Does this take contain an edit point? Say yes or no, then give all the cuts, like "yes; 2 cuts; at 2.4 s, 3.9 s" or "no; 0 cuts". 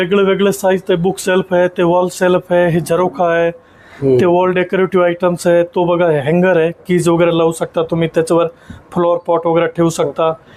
no; 0 cuts